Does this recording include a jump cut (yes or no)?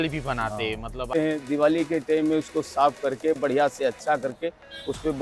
yes